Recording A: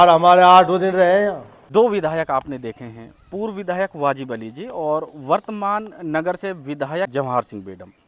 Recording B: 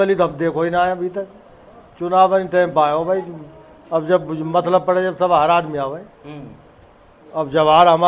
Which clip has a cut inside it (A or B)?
A